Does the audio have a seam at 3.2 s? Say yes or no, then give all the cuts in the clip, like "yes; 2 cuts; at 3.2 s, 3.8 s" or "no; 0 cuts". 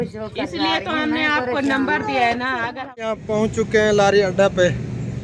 yes; 1 cut; at 3.2 s